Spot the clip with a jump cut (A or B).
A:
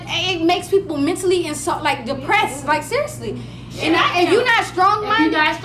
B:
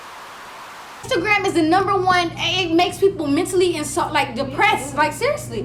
B